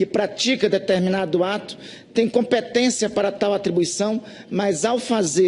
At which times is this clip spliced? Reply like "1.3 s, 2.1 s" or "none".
1.5 s

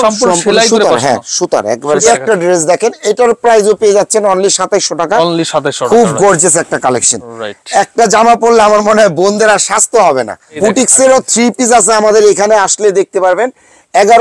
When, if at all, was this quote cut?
2.1 s, 10.4 s

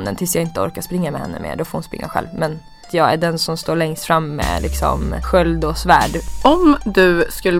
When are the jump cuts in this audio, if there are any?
2.9 s, 5.2 s, 6.2 s

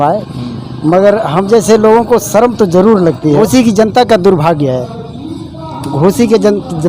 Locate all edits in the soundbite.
3.4 s

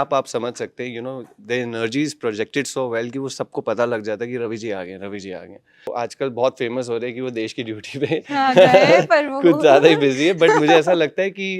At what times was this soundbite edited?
5.9 s

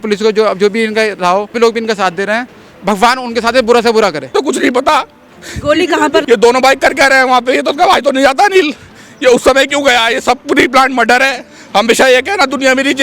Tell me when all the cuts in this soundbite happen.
1.6 s, 4.3 s, 6.2 s, 11.5 s

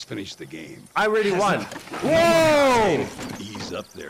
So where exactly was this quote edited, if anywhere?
none

